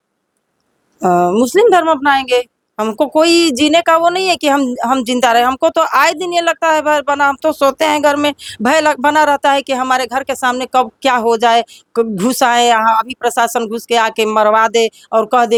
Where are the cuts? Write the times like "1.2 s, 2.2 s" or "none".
none